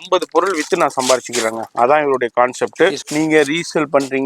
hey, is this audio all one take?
no; 1 cut; at 3.0 s

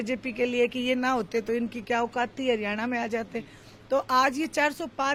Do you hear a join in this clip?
no; 0 cuts

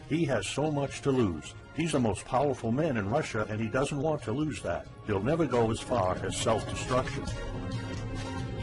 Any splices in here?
no; 0 cuts

